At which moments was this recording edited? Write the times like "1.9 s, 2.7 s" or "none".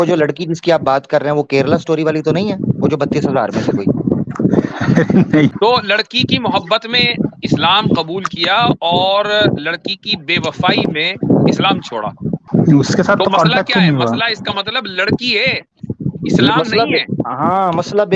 5.5 s, 12.4 s